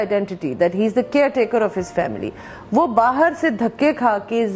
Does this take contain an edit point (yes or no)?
no